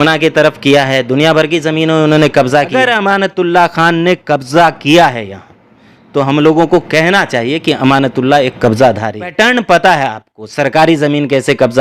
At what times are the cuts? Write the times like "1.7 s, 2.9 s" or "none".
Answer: 2.8 s, 9.1 s